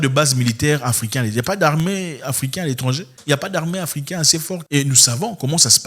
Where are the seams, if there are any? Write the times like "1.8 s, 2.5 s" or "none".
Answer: 4.6 s